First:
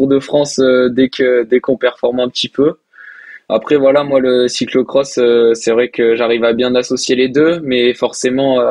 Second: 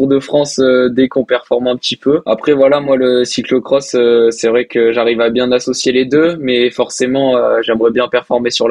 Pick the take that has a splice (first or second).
second